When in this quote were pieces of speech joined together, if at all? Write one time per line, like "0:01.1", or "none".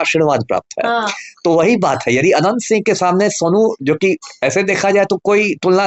none